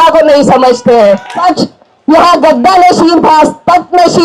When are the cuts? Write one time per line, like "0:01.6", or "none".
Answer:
0:01.3